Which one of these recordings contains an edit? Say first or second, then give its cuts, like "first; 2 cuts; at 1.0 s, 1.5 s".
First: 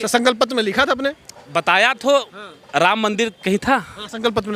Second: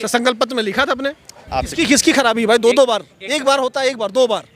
second; 1 cut; at 1.3 s